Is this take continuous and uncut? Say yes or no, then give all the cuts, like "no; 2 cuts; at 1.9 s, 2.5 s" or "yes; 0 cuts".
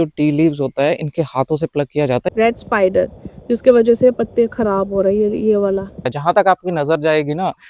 no; 2 cuts; at 2.3 s, 6.1 s